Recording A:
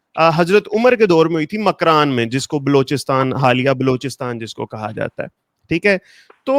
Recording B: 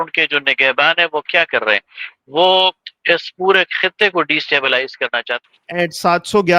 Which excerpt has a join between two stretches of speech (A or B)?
B